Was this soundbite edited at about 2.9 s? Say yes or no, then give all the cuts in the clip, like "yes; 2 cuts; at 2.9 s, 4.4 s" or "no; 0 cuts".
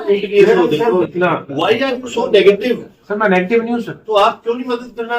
no; 1 cut; at 1.1 s